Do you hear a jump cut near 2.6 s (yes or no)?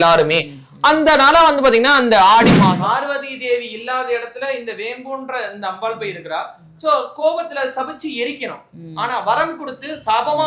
yes